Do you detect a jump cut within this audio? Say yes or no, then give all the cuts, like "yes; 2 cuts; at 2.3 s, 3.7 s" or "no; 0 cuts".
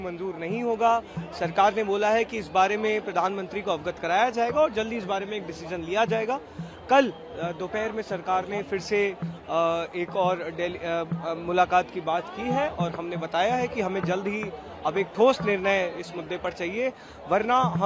no; 0 cuts